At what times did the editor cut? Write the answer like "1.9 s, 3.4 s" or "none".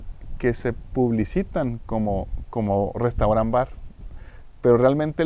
none

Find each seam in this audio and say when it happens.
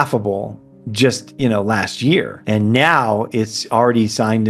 1.3 s, 2.4 s

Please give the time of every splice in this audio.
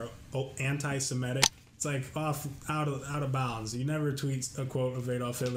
1.5 s

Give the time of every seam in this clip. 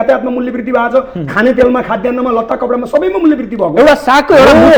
none

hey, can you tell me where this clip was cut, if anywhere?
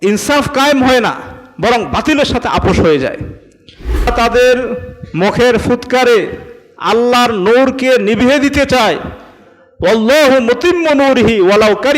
4.1 s

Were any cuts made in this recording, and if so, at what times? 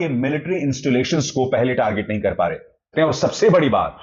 2.9 s

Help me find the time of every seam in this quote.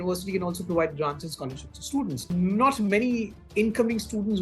2.2 s

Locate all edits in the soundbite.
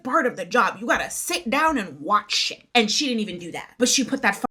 none

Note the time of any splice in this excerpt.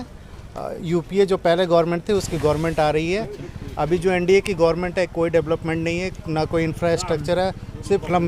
none

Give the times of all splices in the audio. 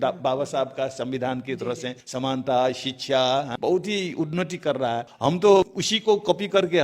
2.0 s, 3.5 s, 5.1 s, 5.8 s

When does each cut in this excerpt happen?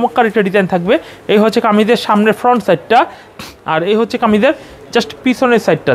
none

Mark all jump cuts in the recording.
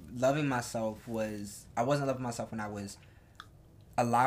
none

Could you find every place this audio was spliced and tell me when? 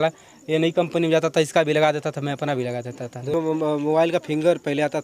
3.3 s

